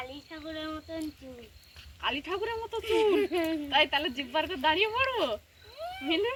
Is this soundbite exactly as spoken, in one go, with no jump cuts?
yes; 0 cuts

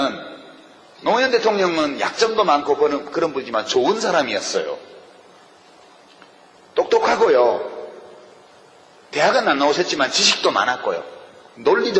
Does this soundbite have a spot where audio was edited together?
no; 0 cuts

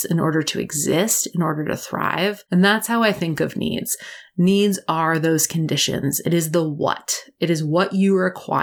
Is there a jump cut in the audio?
yes; 1 cut; at 2.4 s

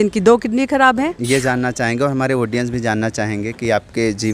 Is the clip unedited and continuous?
no; 1 cut; at 1.2 s

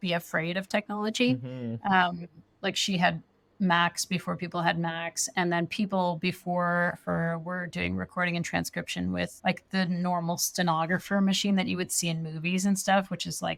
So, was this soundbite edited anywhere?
no; 0 cuts

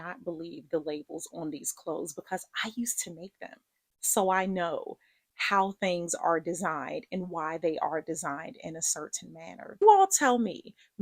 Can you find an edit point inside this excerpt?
yes; 1 cut; at 9.6 s

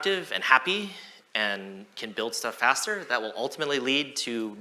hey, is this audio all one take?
yes; 0 cuts

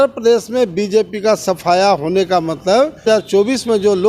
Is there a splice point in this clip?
yes; 1 cut; at 3.0 s

